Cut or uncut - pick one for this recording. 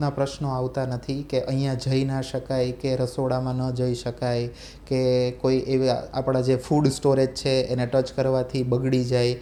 uncut